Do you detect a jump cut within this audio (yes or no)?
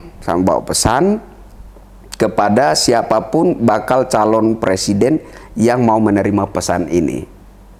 no